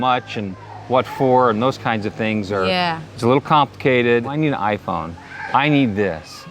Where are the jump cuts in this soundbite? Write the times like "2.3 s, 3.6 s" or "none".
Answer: 4.4 s